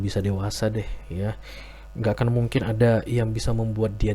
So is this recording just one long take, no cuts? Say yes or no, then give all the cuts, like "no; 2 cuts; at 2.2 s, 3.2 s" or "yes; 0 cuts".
yes; 0 cuts